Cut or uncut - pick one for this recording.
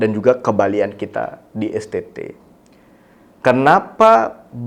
uncut